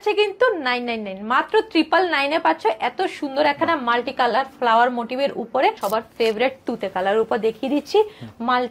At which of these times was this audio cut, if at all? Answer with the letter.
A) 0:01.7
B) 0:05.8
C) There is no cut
B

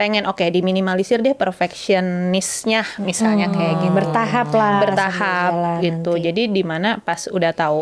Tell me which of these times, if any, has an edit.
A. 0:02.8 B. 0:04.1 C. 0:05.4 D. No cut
D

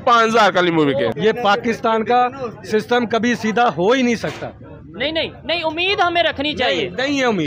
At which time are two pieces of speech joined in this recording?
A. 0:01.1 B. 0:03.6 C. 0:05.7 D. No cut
A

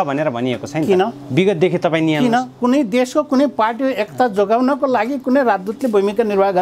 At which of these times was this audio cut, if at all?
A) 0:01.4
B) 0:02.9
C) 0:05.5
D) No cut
D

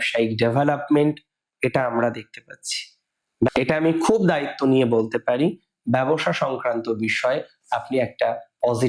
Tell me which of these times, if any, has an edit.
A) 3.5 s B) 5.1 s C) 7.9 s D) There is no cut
A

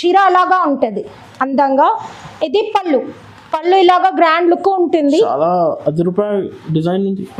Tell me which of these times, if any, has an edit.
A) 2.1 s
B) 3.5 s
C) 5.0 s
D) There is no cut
D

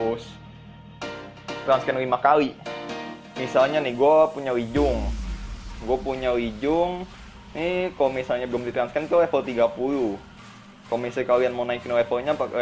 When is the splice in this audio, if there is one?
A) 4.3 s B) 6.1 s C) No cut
A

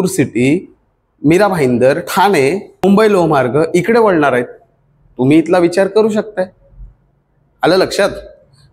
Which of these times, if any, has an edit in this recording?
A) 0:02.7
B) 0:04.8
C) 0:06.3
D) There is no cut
A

